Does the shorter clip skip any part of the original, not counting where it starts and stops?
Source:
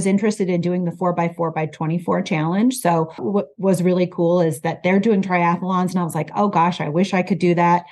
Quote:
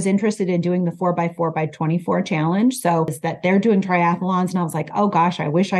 yes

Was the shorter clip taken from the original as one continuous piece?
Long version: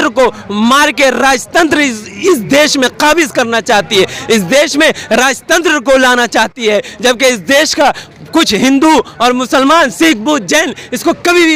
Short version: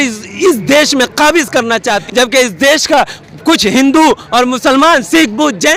no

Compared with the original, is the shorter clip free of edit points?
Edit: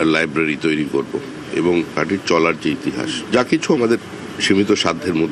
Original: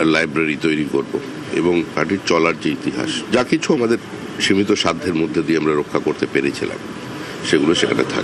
yes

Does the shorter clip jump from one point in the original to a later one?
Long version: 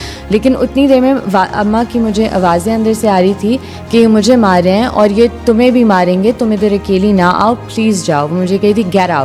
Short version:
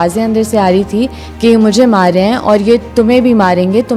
no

